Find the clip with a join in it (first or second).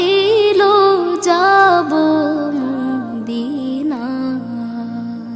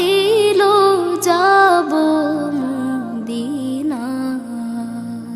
first